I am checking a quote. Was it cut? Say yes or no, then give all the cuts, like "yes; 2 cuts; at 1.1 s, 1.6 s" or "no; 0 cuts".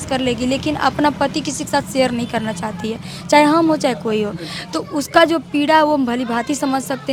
no; 0 cuts